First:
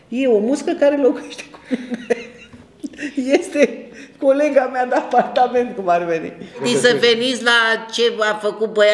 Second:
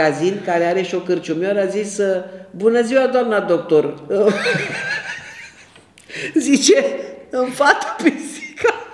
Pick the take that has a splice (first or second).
first